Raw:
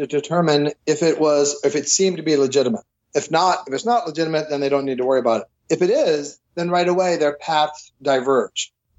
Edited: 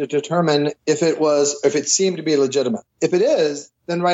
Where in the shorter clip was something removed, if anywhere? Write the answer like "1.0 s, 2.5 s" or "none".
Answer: 2.9 s